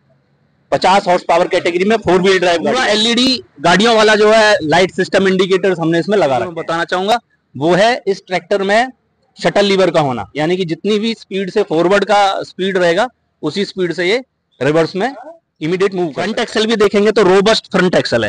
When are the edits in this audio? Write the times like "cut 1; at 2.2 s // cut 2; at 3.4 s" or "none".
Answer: cut 1; at 2.7 s // cut 2; at 6.5 s // cut 3; at 16.1 s

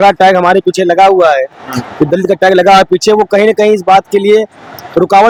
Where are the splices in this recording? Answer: none

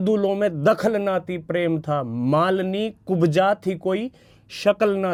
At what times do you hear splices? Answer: none

